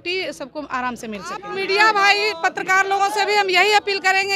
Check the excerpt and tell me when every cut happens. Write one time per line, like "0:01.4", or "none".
0:01.5

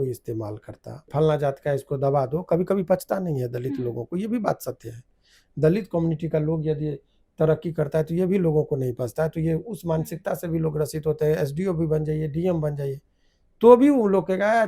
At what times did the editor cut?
0:01.1

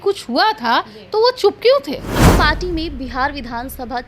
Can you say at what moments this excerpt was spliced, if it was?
0:02.3

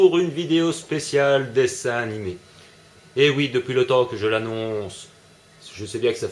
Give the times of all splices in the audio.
none

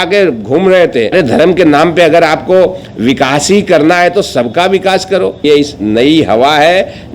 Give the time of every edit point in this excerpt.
0:01.1
0:05.4

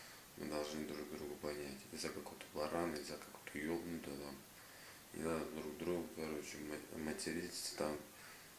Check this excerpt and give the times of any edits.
none

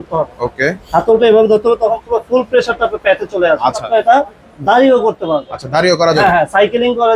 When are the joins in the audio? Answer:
0:03.8

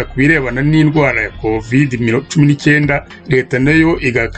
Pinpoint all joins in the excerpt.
0:03.1

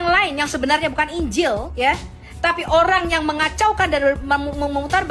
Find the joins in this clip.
none

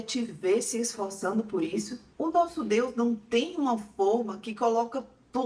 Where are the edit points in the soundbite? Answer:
0:02.0

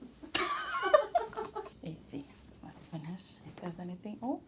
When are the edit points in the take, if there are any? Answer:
0:01.7

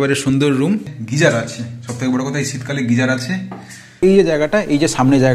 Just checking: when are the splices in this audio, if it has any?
0:00.9
0:04.0

